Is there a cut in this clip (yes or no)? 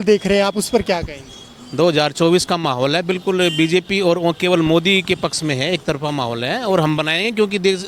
no